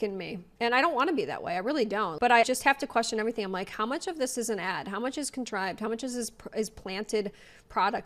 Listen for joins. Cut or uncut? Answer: uncut